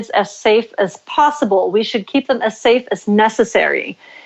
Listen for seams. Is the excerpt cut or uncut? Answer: uncut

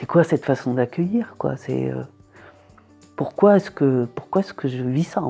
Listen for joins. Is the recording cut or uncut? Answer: uncut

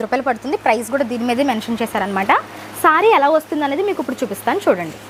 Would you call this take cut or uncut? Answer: uncut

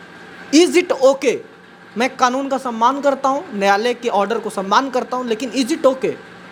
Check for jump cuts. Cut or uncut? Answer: uncut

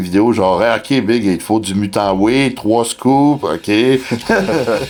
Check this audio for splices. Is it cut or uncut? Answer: uncut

